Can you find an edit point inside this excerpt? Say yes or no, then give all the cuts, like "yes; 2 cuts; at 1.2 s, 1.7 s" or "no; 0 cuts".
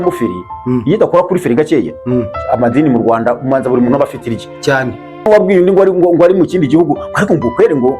yes; 1 cut; at 5.2 s